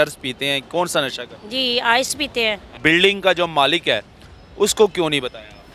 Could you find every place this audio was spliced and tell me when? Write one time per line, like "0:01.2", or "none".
0:02.7